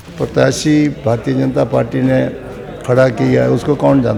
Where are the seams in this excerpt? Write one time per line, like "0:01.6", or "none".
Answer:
none